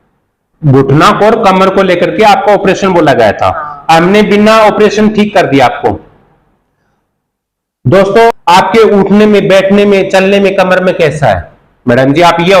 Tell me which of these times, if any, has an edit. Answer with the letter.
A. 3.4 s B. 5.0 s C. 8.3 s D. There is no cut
C